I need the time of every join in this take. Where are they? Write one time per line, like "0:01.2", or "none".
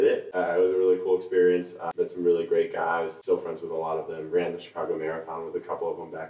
0:01.8